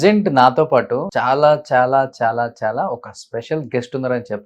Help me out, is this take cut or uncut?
cut